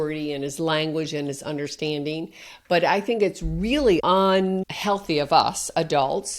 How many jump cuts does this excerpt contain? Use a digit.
2